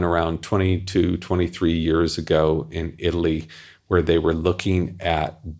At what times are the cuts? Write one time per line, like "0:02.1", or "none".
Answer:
none

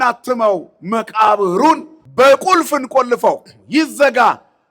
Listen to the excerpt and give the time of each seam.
0:02.0

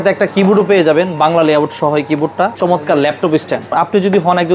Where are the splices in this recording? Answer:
0:02.6
0:03.7

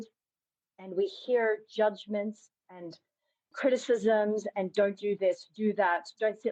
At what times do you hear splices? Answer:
none

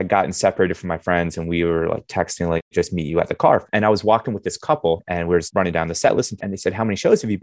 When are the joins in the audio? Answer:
0:02.7
0:03.7
0:05.4
0:06.4

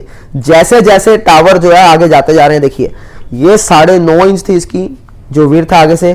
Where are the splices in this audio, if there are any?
none

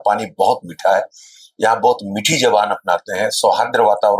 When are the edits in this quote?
none

